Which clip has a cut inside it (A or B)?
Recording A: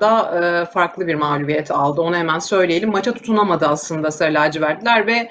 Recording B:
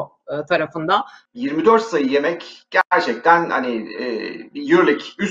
B